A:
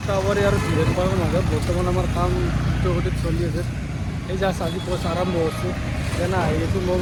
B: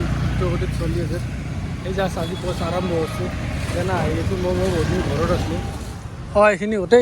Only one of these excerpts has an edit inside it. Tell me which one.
B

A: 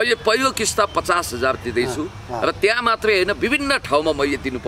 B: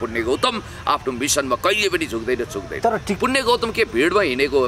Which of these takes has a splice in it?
B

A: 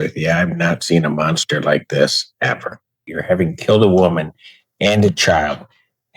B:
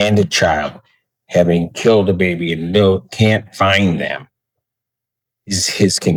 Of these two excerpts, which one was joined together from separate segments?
A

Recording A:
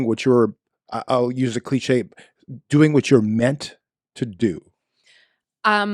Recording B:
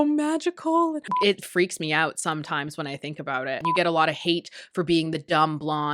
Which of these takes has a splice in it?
B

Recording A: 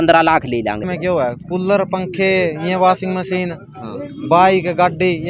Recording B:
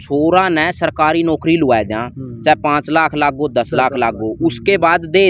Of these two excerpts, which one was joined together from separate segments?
A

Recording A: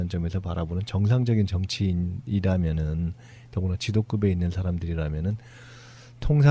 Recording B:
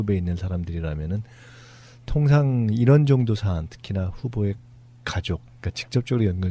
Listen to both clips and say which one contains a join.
A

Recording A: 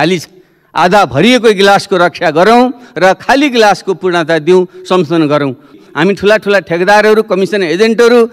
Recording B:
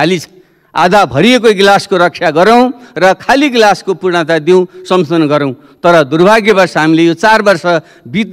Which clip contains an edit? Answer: A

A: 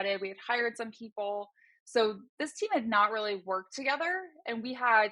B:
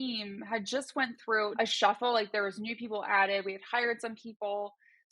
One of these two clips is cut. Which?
B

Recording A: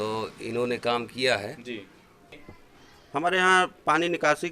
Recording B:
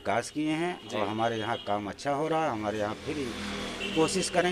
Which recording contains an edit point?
A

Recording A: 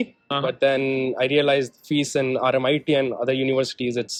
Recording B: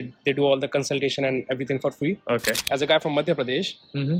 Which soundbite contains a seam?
B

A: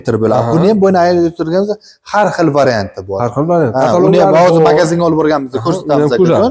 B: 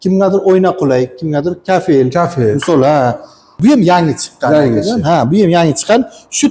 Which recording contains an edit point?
B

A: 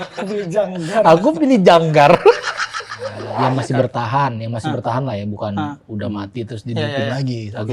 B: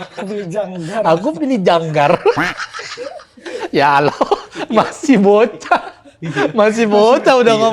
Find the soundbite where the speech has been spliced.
A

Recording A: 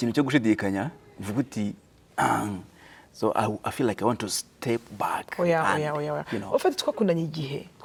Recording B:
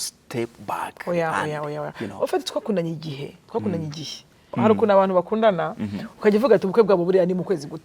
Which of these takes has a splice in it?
B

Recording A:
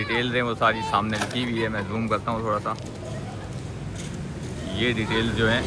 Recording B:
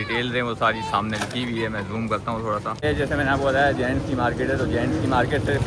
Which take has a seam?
B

